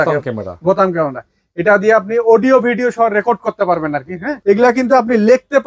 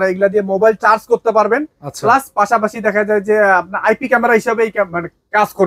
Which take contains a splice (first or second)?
first